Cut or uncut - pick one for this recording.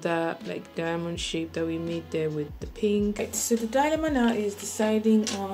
cut